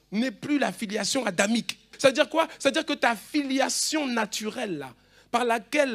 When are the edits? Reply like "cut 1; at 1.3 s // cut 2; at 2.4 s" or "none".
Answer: cut 1; at 1.9 s

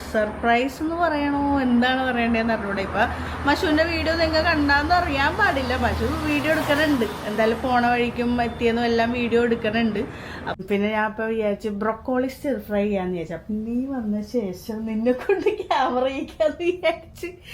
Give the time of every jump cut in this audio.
cut 1; at 10.6 s

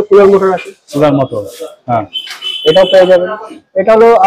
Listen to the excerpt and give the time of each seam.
none

